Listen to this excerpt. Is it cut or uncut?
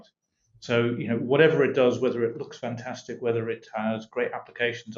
uncut